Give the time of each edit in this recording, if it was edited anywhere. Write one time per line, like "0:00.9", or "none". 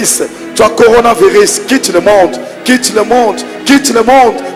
none